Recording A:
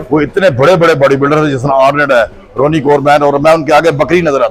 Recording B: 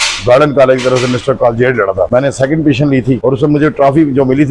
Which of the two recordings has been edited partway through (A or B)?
B